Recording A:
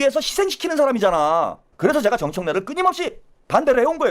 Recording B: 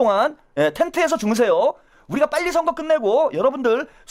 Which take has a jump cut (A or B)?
A